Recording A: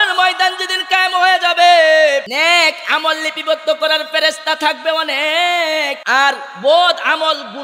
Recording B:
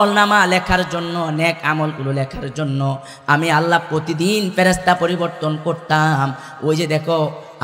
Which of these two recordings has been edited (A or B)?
A